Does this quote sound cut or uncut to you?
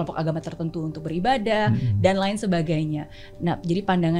uncut